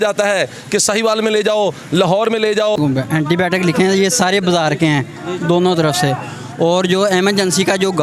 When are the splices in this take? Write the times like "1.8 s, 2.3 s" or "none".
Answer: 2.8 s

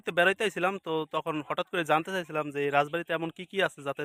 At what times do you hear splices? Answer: none

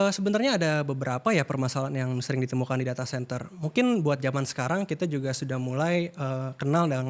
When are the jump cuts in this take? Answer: none

